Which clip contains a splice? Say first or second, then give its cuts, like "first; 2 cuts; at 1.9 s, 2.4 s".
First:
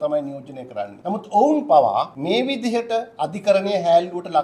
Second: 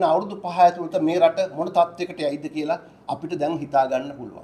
first; 2 cuts; at 0.9 s, 2.1 s